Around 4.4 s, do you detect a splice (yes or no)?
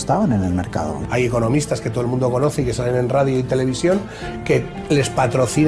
no